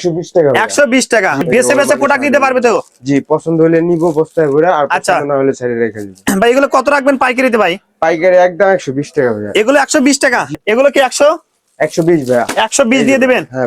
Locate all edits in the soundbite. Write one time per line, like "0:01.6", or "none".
0:01.4
0:06.1
0:10.5